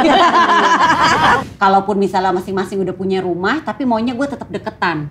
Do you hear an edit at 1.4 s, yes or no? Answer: yes